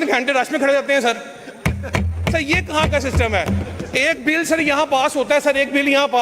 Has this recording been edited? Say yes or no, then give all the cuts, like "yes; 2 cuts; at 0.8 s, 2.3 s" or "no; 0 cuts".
no; 0 cuts